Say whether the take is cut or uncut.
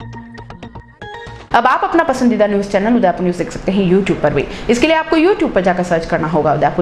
uncut